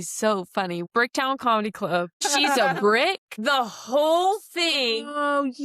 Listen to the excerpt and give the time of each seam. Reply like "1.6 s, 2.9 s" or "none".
0.8 s, 2.2 s, 3.3 s